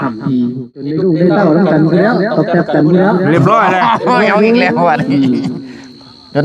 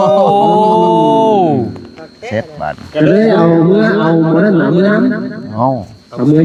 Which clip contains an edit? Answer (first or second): first